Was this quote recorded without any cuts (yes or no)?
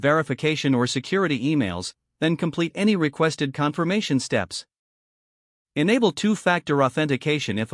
yes